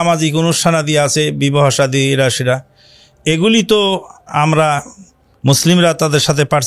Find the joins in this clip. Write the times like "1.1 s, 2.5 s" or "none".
none